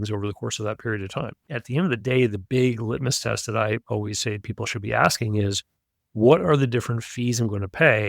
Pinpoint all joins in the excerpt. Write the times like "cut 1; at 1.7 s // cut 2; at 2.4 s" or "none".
cut 1; at 1.4 s